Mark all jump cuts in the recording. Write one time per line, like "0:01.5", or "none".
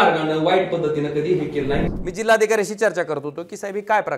0:01.8